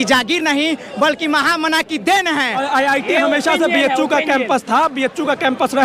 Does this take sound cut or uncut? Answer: cut